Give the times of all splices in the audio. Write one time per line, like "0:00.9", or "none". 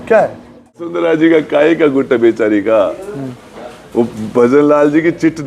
0:01.1

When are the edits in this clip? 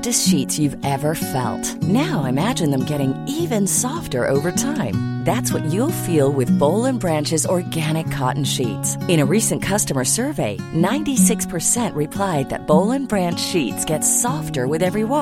none

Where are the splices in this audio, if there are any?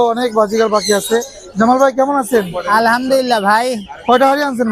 none

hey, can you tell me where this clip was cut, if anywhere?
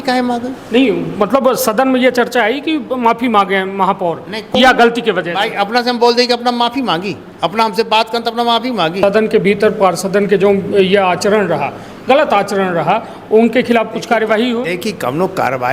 0:09.0

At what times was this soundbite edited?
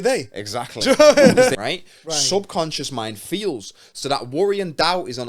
0:01.5

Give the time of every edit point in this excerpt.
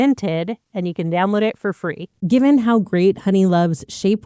0:02.2

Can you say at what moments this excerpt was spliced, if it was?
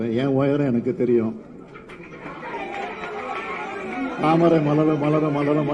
0:02.5

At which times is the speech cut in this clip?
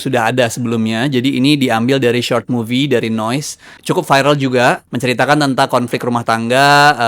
0:03.7
0:04.9

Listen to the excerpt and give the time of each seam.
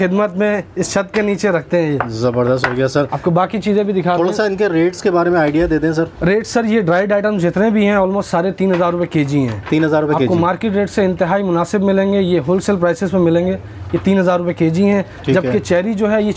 none

